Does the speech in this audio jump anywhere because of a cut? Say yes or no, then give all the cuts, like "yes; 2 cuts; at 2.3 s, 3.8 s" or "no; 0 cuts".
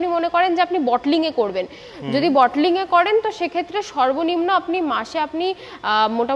no; 0 cuts